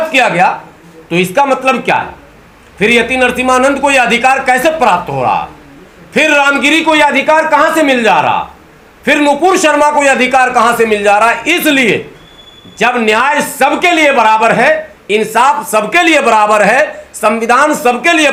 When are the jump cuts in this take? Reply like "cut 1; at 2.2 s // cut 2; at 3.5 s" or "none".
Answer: none